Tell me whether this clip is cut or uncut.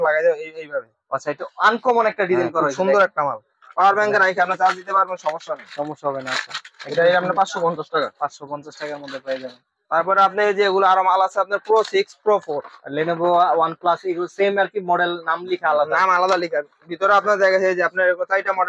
uncut